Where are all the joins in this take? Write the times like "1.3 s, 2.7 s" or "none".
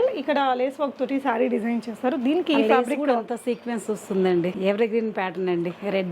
4.6 s